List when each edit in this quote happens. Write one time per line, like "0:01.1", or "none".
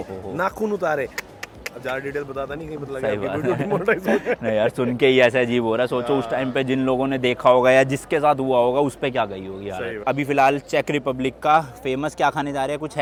none